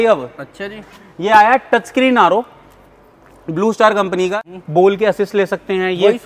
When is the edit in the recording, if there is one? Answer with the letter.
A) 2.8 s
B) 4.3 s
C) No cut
B